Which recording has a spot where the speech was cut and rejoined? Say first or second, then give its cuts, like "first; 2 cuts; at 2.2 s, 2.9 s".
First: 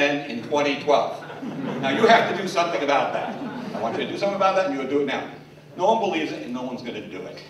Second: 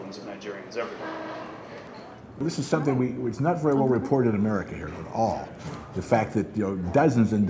second; 1 cut; at 1.8 s